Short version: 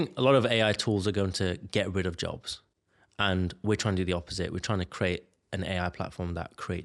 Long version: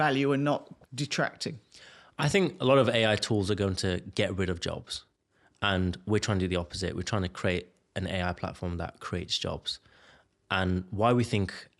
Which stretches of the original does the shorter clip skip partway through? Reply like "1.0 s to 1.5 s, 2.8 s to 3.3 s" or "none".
none